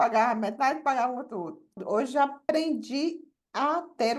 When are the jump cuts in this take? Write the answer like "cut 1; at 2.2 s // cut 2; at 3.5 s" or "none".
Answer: cut 1; at 1.8 s // cut 2; at 2.4 s